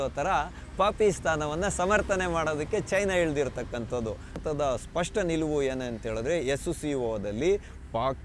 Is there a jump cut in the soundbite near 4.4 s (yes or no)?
yes